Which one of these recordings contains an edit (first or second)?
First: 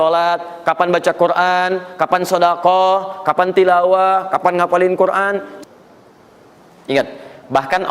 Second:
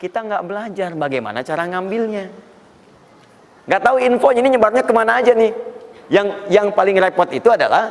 first